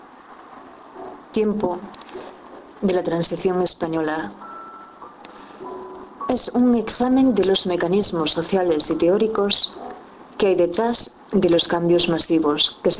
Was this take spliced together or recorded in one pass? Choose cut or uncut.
cut